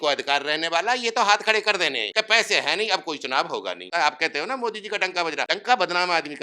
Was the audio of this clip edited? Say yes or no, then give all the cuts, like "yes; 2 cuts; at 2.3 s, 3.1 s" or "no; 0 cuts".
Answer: yes; 3 cuts; at 2.0 s, 3.9 s, 5.5 s